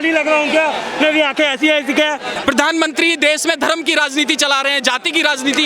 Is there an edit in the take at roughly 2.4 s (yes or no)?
yes